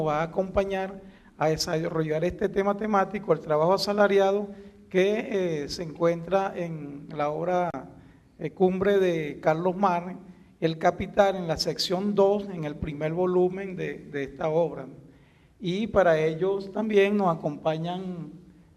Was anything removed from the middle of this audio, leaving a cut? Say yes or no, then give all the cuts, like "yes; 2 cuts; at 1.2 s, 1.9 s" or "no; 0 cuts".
yes; 1 cut; at 10.5 s